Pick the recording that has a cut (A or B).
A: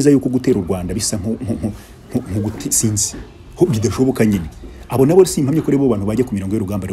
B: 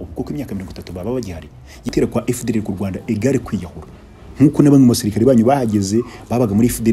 B